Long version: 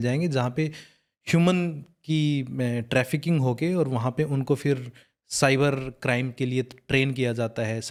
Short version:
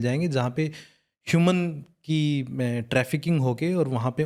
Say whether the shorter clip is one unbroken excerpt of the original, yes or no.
yes